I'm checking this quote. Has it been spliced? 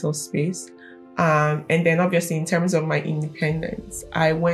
no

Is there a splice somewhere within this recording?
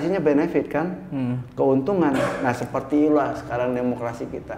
no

